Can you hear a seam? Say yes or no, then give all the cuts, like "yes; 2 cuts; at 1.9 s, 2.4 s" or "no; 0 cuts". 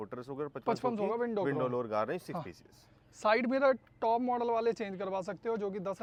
no; 0 cuts